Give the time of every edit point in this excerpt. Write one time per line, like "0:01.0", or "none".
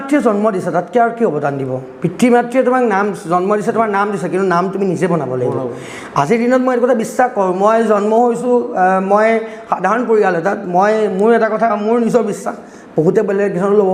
none